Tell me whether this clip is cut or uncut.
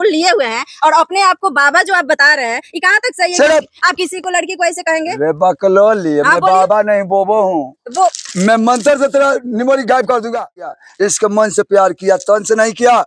cut